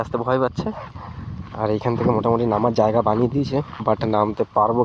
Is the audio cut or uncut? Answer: uncut